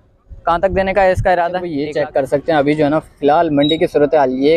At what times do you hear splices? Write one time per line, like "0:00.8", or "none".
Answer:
0:01.8